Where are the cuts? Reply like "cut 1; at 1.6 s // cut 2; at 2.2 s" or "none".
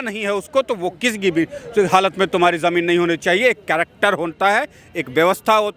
none